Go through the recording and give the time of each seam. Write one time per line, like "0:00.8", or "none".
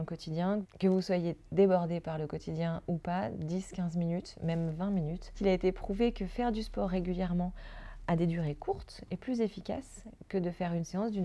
none